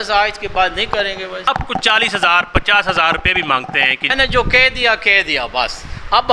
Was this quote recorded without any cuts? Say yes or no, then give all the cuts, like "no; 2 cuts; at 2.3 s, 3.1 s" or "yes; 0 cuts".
no; 2 cuts; at 1.5 s, 4.1 s